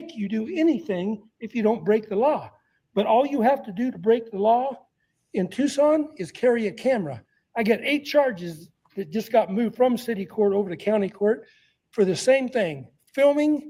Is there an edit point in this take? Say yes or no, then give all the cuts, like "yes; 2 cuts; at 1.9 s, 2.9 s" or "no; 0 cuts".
no; 0 cuts